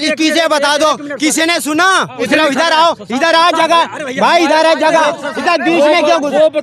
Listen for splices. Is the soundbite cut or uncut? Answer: cut